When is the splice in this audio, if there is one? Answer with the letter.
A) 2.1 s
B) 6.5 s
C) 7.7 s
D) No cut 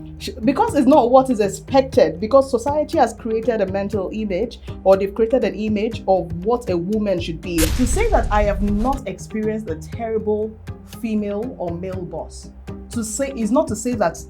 C